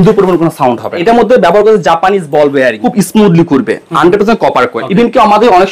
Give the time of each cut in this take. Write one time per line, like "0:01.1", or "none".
0:01.0
0:02.8
0:04.8